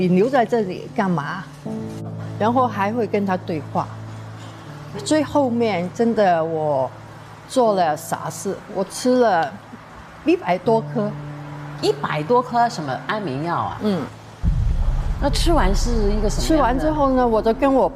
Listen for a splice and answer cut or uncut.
uncut